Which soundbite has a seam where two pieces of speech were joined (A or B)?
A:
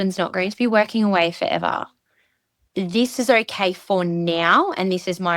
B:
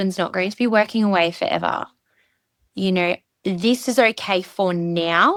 A